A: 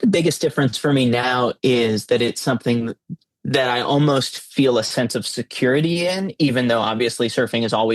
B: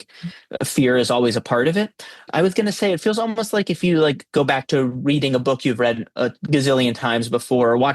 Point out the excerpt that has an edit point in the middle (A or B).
B